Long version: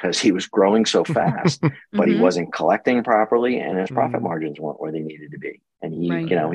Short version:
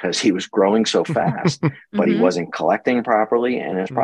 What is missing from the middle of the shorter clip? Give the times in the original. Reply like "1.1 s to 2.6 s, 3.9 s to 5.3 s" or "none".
none

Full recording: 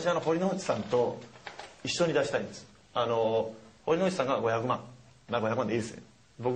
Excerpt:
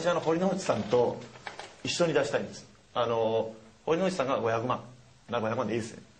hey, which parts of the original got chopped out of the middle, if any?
none

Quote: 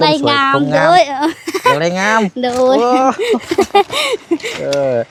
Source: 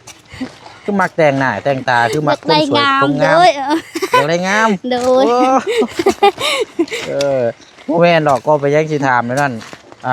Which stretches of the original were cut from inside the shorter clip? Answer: none

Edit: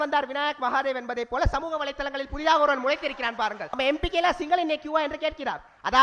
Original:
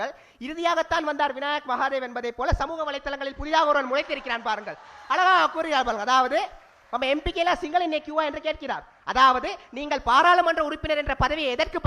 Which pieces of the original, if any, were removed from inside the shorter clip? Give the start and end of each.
4.7 s to 6.9 s

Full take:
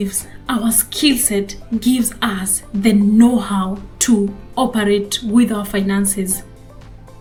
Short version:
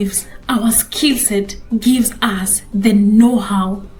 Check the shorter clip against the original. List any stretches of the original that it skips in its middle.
none

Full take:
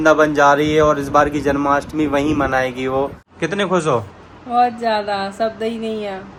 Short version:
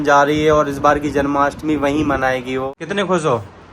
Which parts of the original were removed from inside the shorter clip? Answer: 3.0 s to 3.3 s

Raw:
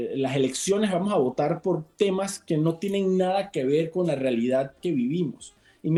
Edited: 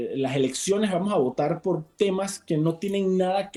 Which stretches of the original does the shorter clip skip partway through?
none

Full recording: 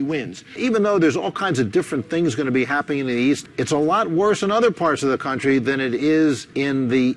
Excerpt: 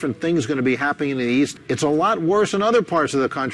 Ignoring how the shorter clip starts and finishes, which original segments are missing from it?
none

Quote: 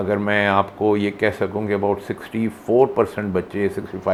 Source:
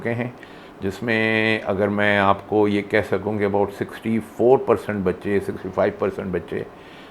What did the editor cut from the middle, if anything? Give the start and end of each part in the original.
none

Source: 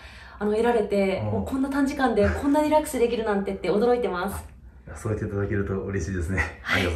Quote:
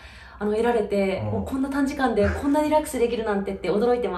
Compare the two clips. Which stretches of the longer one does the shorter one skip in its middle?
none

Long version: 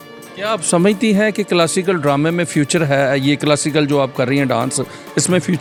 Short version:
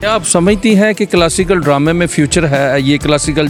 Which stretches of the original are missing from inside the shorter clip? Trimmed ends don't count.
none

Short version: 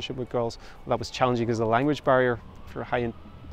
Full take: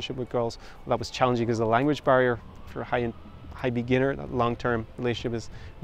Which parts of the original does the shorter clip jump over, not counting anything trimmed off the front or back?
none

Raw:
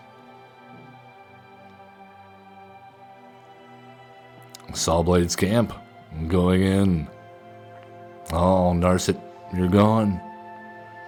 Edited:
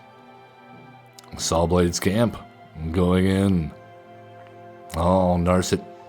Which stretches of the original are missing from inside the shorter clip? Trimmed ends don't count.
1.1 s to 4.5 s

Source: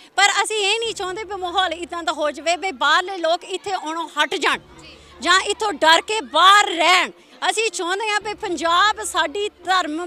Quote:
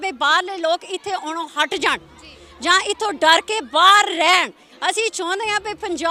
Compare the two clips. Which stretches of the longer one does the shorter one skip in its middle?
none

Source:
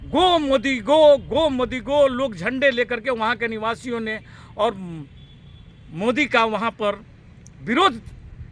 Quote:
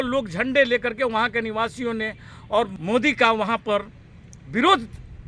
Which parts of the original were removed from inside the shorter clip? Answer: 4.8 s to 5.9 s

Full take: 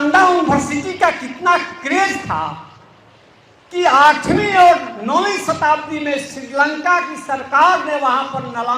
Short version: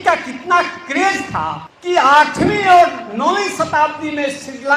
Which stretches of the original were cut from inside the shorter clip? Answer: 2.6 s to 3.6 s

